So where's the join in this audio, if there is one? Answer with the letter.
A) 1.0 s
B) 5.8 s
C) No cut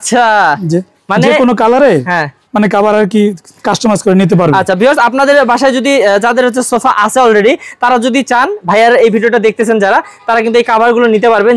C